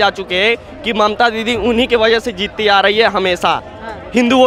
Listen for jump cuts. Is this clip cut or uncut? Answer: uncut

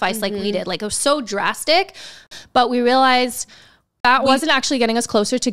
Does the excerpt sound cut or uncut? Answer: cut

